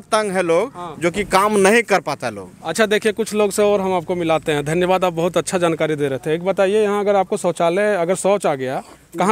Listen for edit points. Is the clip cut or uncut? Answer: uncut